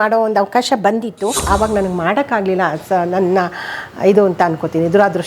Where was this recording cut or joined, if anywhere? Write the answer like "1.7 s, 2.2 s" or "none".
1.4 s